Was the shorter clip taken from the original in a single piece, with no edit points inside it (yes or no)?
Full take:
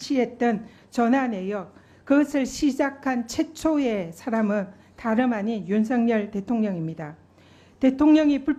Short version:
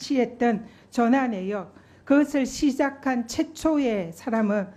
yes